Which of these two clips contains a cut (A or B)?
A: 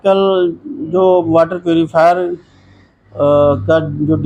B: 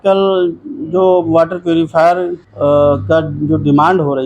B